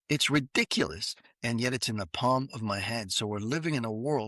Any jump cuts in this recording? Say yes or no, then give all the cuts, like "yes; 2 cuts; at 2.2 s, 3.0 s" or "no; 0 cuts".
no; 0 cuts